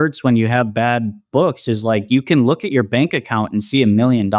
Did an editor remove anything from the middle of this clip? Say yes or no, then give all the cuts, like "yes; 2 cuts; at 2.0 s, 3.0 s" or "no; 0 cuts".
no; 0 cuts